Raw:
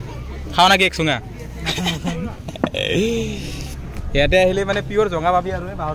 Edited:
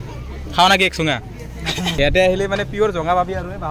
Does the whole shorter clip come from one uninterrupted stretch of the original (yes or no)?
no